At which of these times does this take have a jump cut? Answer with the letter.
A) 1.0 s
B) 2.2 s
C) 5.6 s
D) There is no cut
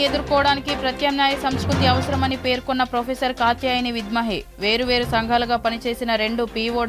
D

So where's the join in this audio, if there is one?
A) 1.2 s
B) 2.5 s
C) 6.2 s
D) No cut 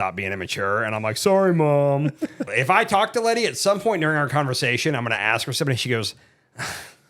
B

